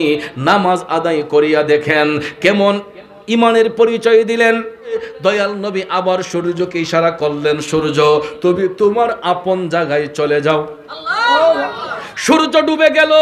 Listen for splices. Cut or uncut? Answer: cut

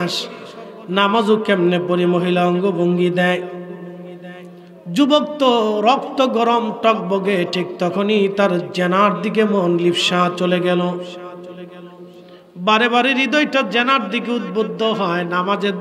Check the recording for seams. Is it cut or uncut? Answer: uncut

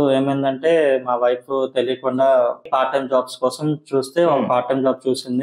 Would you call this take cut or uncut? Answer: cut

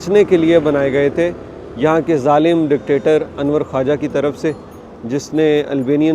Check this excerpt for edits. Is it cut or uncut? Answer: uncut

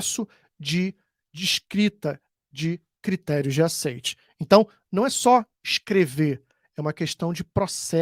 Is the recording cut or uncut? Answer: uncut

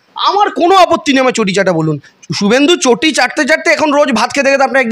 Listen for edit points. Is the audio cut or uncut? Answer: cut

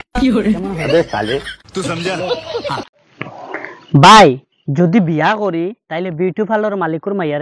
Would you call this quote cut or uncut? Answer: cut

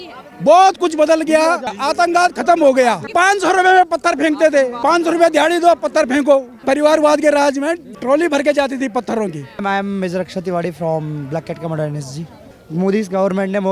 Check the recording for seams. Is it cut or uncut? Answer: cut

